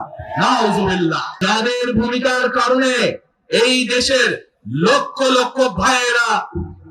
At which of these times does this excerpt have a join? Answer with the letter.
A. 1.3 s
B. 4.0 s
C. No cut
A